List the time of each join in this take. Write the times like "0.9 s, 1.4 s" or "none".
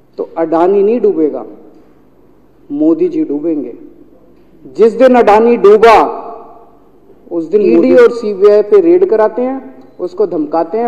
7.8 s